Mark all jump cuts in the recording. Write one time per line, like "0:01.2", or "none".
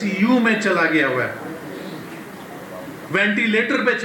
none